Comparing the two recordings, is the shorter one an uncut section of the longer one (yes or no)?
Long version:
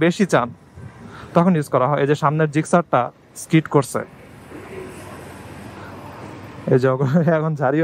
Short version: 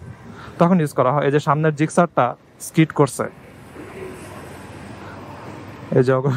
yes